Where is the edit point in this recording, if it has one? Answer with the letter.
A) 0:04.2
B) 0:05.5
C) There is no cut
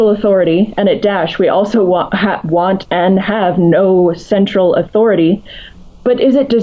C